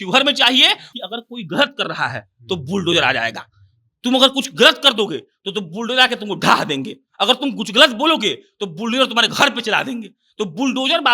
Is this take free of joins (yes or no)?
no